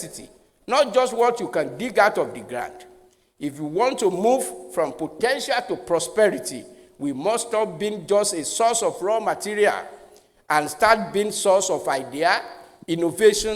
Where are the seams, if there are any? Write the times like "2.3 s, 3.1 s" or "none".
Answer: none